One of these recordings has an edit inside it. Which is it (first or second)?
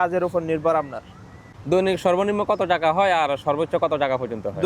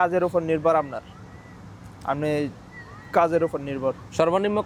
first